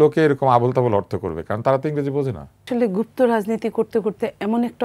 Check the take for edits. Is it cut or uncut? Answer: cut